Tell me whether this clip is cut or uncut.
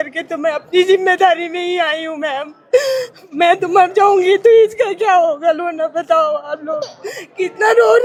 uncut